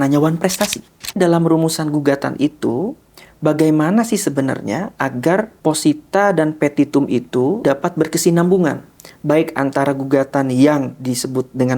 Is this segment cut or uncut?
cut